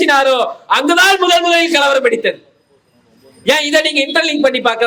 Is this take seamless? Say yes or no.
yes